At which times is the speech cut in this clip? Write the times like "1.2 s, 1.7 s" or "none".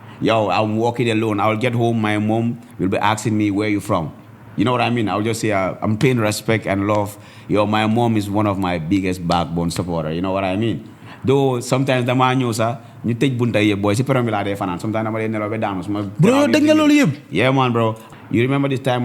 18.0 s